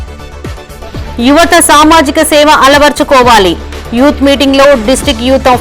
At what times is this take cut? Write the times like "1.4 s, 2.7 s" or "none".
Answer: none